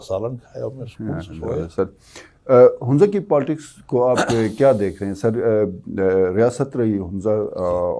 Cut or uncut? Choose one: uncut